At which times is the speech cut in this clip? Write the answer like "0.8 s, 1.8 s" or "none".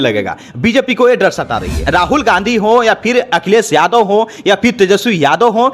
1.8 s